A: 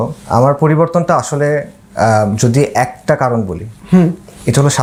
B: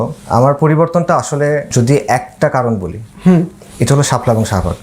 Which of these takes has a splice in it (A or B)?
B